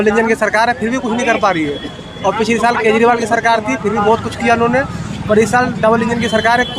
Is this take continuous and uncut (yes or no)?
yes